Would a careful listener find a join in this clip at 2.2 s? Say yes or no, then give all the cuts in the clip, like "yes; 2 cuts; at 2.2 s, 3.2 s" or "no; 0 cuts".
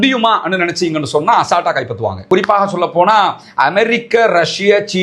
yes; 1 cut; at 2.2 s